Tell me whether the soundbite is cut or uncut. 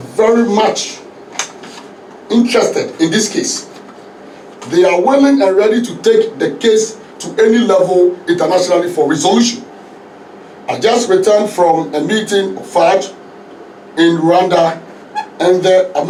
uncut